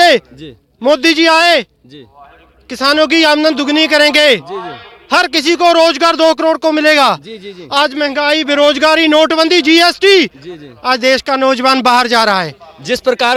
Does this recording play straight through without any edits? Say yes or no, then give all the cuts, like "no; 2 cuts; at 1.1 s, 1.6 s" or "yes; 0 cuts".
yes; 0 cuts